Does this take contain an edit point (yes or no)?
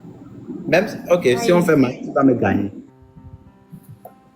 yes